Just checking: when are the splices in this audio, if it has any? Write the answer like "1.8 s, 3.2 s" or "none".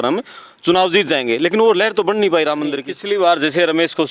2.9 s